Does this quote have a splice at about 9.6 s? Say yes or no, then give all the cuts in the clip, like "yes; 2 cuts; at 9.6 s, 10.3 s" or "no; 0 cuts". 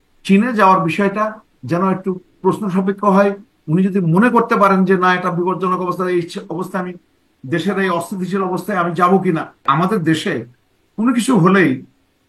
yes; 1 cut; at 9.6 s